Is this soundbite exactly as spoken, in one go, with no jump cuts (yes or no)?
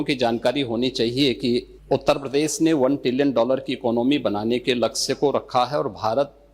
no